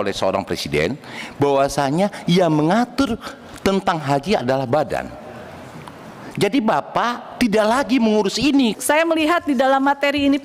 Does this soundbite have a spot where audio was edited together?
yes; 1 cut; at 8.8 s

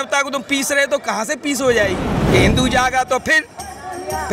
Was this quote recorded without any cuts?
no; 1 cut; at 2.1 s

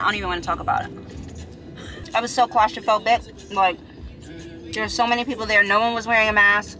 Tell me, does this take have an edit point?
no; 0 cuts

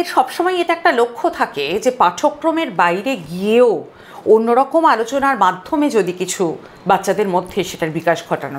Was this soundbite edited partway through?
no; 0 cuts

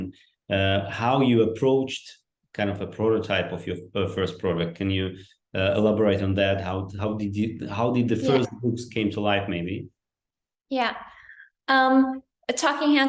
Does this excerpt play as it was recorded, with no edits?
yes; 0 cuts

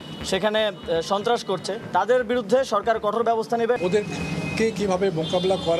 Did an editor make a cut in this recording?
yes; 2 cuts; at 1.8 s, 3.8 s

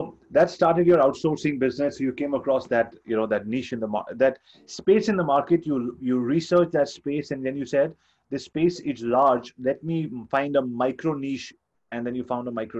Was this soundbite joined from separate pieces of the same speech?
no; 0 cuts

